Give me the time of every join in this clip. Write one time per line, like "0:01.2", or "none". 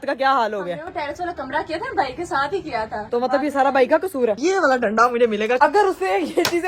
0:03.0
0:04.4
0:05.6